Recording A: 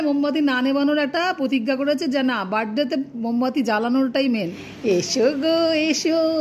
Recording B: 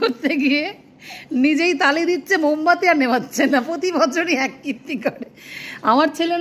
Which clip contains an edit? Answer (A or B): A